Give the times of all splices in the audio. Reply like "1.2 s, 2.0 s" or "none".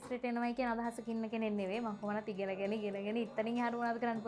none